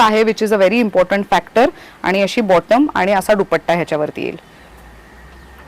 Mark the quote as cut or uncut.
uncut